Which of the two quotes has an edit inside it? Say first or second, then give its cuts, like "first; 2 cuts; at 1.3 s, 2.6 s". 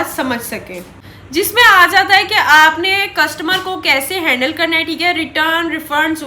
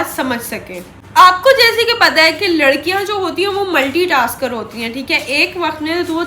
first; 1 cut; at 1.0 s